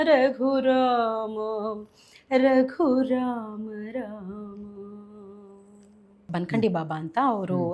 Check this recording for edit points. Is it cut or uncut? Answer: cut